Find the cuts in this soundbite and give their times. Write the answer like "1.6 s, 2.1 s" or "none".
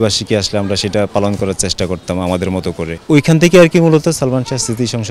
3.0 s